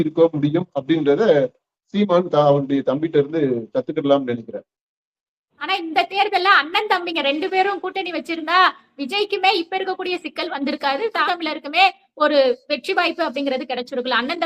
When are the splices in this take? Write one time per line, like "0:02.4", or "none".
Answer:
0:05.5
0:11.2